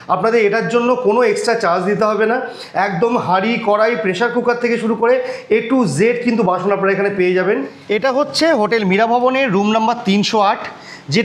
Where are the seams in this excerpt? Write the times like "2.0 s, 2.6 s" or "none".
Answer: 7.7 s